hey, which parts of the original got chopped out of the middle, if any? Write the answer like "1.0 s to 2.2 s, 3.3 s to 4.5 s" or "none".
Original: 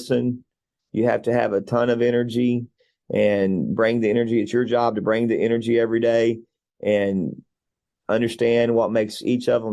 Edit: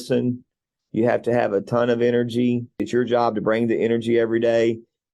2.9 s to 4.5 s

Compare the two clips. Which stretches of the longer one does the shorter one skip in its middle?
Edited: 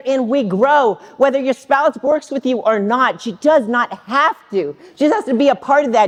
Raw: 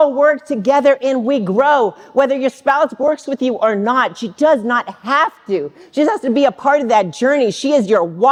none

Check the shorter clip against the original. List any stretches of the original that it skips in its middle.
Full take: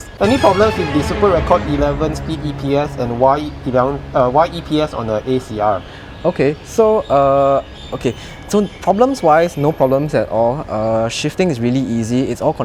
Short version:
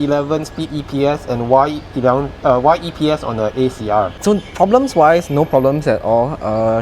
5.8 s to 8.4 s

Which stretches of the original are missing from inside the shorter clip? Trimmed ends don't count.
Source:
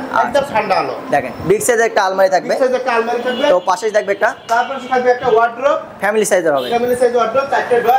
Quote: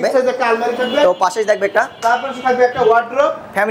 none

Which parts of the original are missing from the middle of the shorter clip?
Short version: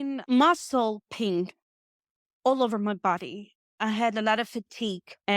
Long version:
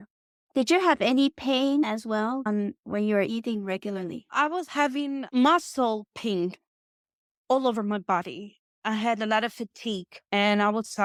none

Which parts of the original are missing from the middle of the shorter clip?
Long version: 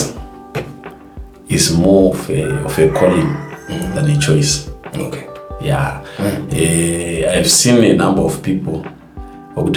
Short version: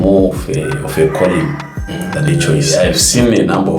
4.5 s to 7.1 s

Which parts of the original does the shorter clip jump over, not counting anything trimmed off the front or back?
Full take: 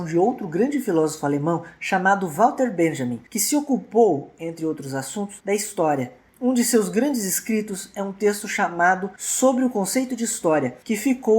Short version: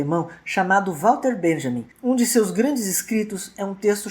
3.2 s to 6.2 s

